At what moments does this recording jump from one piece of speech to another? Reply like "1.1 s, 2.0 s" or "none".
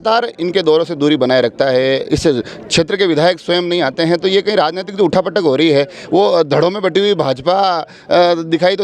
none